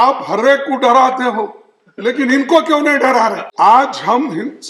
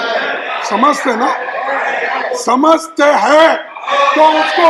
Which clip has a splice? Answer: first; 1 cut; at 3.4 s

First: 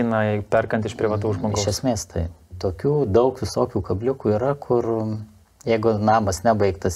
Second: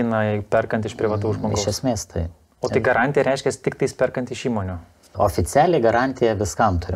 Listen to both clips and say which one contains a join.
first; 1 cut; at 2.5 s

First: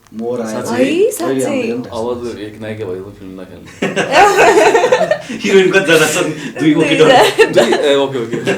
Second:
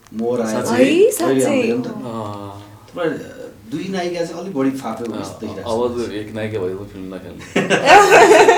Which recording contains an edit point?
first; 1 cut; at 1.9 s

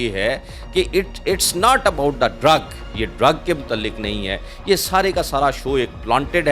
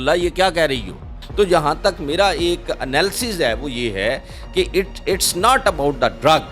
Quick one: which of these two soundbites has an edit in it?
second; 1 cut; at 1.1 s

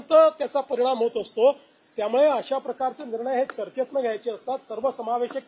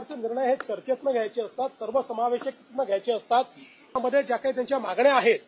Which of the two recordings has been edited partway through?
second; 1 cut; at 4.0 s

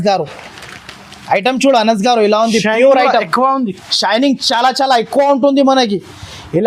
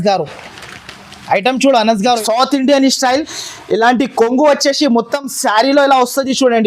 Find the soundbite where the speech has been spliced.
second; 1 cut; at 2.2 s

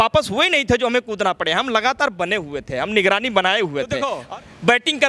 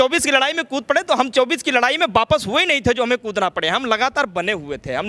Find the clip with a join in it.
first; 1 cut; at 4.1 s

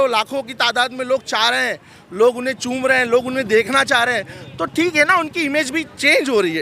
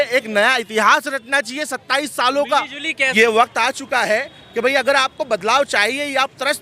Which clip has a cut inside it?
second; 1 cut; at 3.1 s

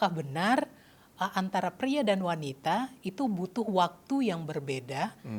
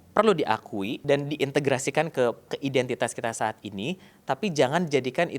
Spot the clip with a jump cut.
second; 2 cuts; at 1.0 s, 2.5 s

